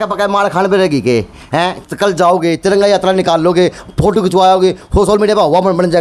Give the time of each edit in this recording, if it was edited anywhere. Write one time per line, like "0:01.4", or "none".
none